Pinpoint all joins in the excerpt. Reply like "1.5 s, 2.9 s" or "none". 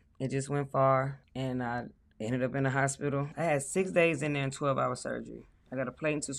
1.2 s, 3.3 s